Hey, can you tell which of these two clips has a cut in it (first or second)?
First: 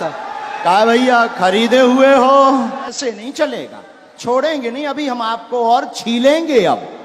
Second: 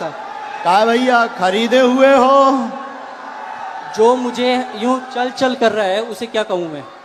first